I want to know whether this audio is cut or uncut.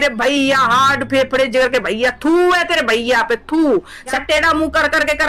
cut